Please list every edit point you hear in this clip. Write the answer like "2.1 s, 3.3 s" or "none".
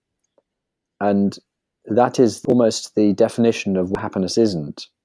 none